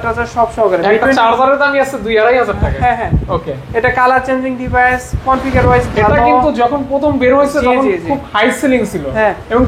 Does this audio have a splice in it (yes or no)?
no